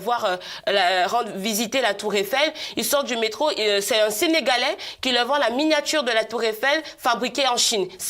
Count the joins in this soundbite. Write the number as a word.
zero